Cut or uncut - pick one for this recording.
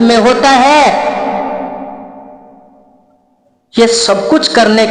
uncut